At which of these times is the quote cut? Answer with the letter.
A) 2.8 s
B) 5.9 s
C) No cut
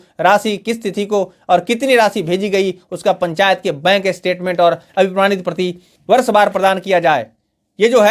B